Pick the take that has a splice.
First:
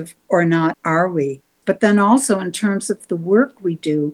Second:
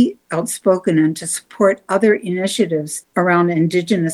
first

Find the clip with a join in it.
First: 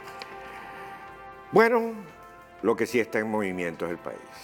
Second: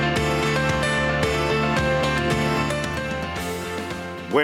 second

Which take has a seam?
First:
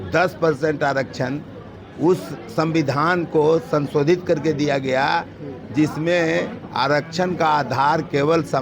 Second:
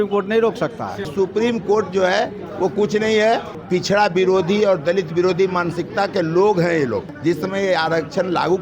second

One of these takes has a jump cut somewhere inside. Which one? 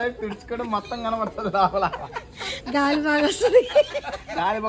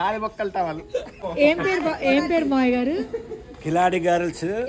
second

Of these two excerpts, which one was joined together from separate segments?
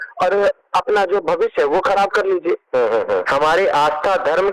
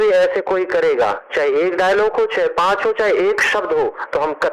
first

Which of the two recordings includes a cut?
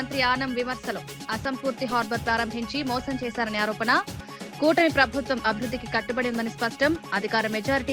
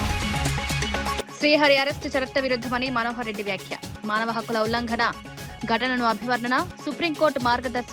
second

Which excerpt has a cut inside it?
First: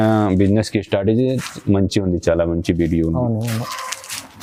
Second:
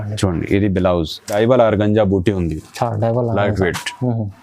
second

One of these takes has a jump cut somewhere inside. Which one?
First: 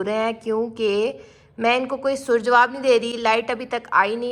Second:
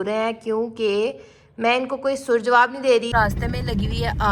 second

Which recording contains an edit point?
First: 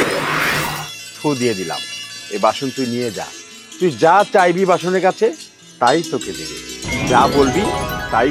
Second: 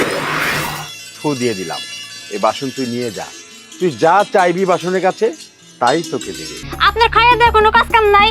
second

